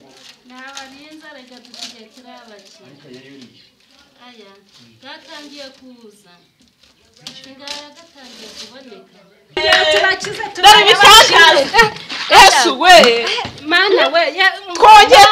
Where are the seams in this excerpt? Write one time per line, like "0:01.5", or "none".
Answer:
0:09.6